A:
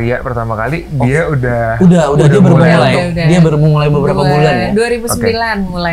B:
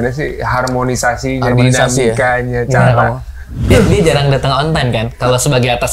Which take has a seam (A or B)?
B